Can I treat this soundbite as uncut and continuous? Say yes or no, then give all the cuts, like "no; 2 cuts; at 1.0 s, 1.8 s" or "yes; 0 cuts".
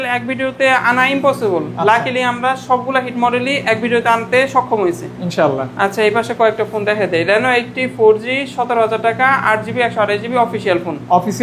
yes; 0 cuts